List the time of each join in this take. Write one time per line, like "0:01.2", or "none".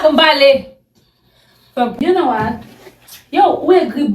0:01.9